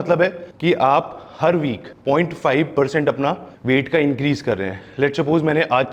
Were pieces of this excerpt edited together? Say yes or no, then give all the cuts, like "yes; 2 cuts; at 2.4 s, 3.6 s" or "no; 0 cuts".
no; 0 cuts